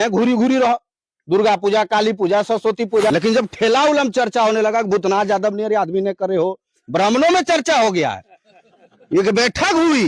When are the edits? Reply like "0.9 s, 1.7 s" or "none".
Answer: 3.1 s